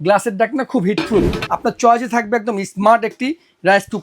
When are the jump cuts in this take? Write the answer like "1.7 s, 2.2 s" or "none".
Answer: 1.4 s